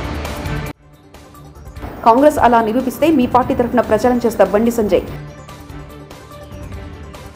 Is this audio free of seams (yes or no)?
yes